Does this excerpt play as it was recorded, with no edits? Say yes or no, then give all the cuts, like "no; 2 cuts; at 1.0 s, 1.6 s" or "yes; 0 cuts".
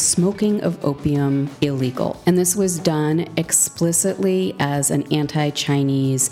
no; 1 cut; at 1.9 s